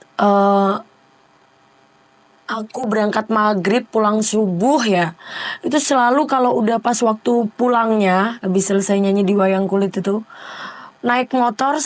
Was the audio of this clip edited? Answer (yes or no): no